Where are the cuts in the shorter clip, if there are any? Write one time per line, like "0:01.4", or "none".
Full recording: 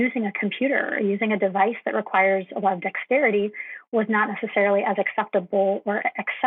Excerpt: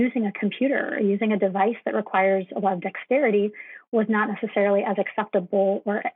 none

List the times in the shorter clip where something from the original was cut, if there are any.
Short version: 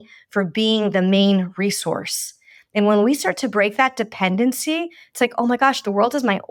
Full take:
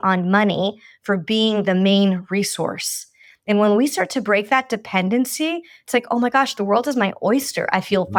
none

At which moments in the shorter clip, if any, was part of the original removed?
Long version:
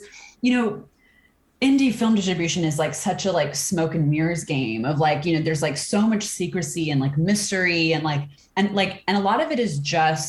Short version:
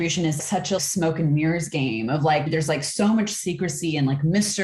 0:00.7
0:02.5

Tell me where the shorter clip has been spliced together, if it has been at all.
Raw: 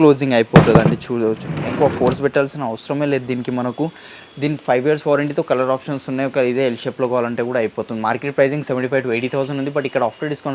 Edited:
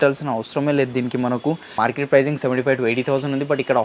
0:01.7

